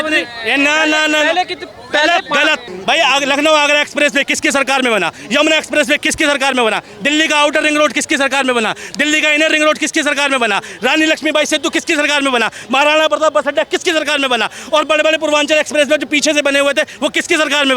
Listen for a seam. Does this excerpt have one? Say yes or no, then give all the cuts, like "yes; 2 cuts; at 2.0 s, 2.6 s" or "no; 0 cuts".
yes; 1 cut; at 2.6 s